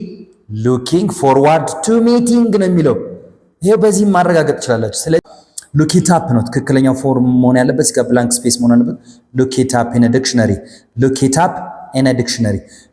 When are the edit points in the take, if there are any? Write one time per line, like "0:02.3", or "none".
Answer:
0:05.2